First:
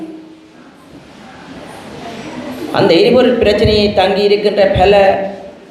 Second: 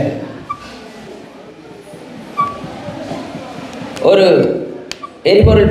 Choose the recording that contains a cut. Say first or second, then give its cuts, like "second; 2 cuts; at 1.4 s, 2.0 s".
second; 1 cut; at 1.1 s